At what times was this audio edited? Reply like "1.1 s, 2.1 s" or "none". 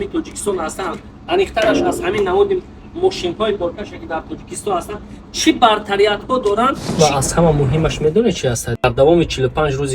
6.9 s